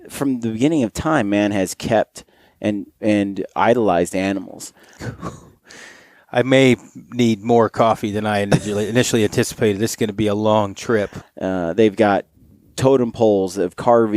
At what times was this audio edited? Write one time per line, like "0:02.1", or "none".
0:05.0
0:11.2